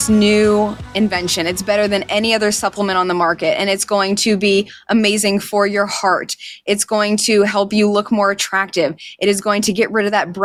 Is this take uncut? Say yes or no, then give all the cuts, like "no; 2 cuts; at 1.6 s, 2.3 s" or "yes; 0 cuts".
yes; 0 cuts